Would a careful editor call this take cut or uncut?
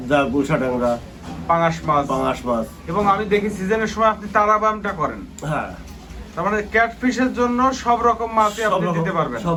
uncut